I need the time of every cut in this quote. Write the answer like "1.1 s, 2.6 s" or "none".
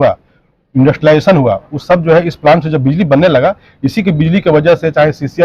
none